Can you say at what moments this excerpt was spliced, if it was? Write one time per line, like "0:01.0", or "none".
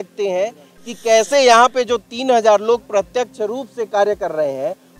none

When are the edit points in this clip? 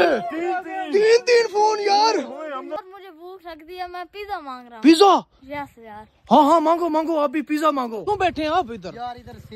0:02.8
0:08.1

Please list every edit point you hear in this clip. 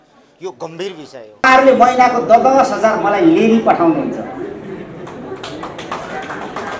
0:01.4

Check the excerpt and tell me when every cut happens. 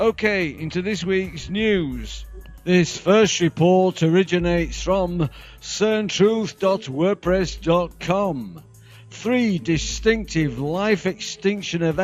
0:06.8

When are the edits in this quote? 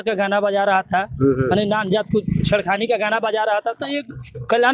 0:03.8

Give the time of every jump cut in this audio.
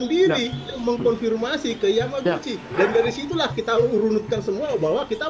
0:02.6

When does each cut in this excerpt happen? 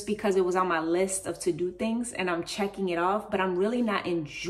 none

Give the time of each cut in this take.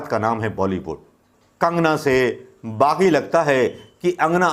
0:01.4

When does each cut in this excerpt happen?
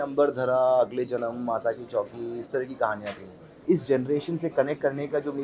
0:03.6

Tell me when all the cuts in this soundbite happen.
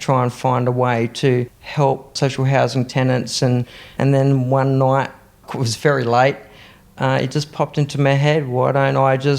0:01.6
0:05.5

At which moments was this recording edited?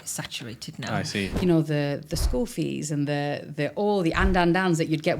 0:01.4

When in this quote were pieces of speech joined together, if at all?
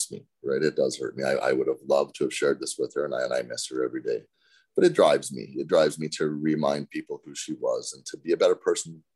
0:04.3

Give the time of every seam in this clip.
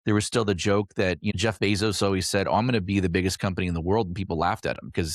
0:01.3

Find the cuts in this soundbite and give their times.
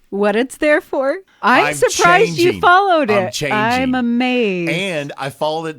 0:01.2

